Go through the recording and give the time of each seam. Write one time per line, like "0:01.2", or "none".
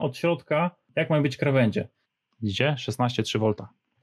0:00.8
0:02.0